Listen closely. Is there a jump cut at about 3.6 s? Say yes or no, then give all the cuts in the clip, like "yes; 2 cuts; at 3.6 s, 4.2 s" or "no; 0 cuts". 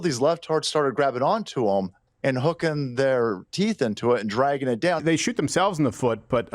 no; 1 cut; at 5.0 s